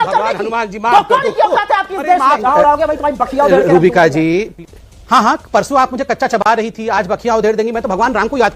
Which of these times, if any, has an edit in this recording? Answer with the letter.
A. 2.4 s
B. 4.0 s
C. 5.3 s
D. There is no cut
A